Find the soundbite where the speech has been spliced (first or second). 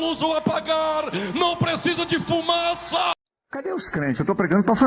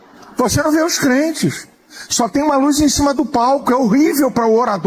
first